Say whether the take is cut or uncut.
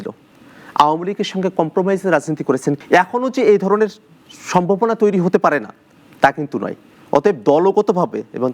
cut